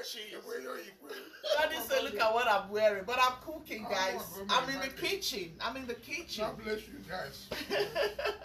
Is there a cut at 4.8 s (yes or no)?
no